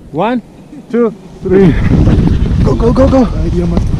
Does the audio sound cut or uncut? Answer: cut